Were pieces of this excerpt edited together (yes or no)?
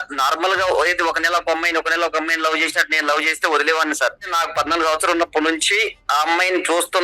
yes